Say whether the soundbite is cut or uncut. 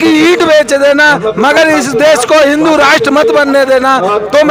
uncut